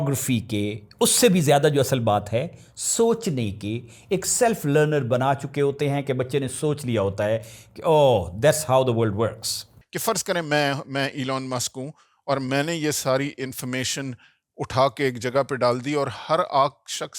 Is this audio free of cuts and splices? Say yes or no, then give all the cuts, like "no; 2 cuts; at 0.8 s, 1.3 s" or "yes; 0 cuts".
no; 1 cut; at 9.9 s